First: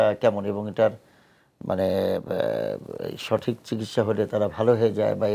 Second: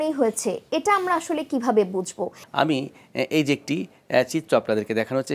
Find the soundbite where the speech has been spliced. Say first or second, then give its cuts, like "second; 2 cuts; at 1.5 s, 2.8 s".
second; 1 cut; at 2.4 s